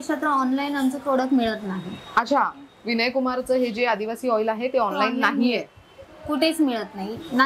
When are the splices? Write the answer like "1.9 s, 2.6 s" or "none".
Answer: none